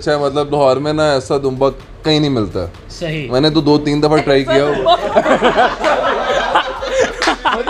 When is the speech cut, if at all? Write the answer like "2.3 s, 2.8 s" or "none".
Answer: none